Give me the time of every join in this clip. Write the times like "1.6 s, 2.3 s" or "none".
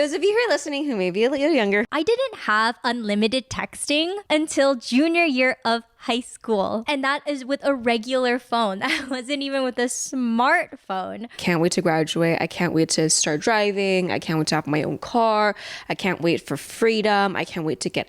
1.9 s, 6.8 s, 11.3 s